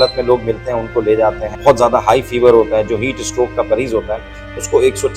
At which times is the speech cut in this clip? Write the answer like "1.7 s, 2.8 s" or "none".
1.5 s